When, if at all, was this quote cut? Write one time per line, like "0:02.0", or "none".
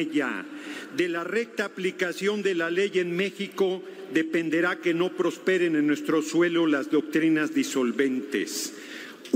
none